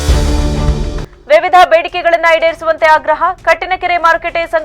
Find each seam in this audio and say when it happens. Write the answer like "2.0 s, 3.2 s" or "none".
1.1 s